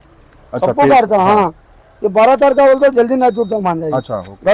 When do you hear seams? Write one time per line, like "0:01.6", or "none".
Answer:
none